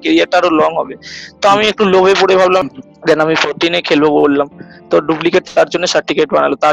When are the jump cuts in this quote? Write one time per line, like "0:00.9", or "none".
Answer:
0:02.6

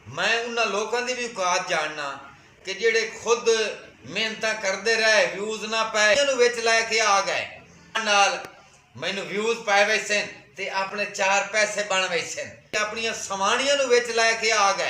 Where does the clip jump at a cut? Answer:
0:06.2
0:08.0
0:12.8

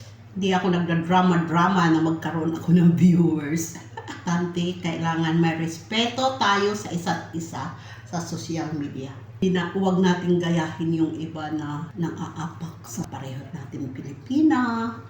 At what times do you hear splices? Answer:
0:04.2
0:09.4
0:11.9
0:13.1

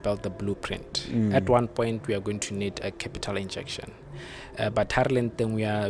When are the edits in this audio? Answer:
none

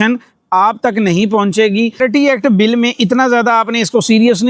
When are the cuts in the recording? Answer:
0:02.0

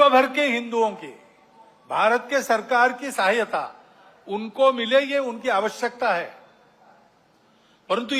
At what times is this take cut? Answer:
none

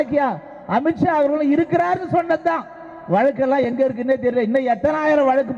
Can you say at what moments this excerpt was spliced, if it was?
none

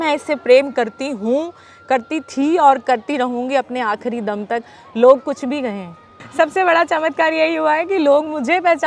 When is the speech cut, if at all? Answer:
0:06.2

